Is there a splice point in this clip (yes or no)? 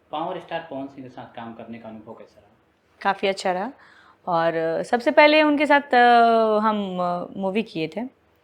no